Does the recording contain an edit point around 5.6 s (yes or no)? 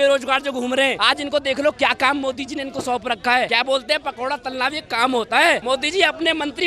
yes